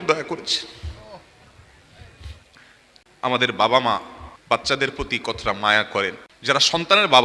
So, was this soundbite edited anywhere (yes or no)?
yes